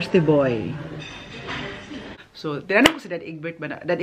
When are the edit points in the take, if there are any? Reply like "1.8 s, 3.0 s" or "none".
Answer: 2.2 s